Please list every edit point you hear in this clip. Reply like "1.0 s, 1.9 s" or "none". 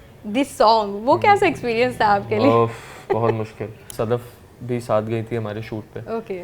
3.8 s

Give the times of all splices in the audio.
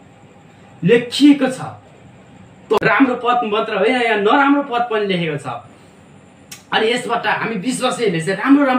2.8 s

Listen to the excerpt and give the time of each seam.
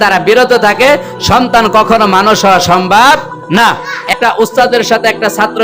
4.0 s

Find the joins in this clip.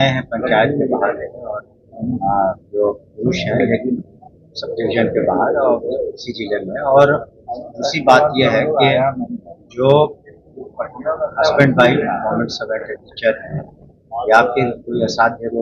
none

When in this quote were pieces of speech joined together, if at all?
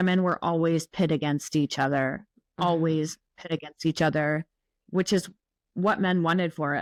none

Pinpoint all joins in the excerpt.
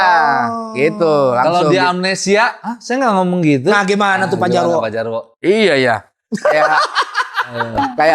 none

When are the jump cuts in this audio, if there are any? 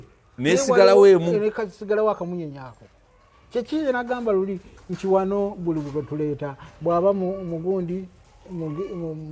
none

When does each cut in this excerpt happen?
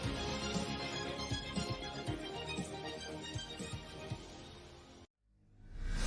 5.1 s

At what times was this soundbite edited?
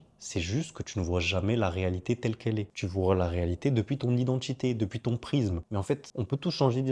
none

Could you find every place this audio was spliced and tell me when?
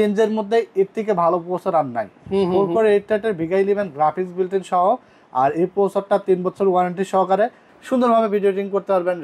7.7 s

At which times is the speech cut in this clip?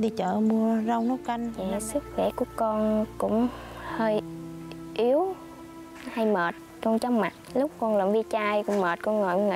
1.5 s

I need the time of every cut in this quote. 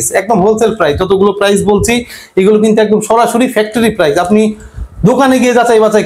none

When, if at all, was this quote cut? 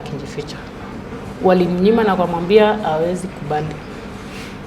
0.9 s

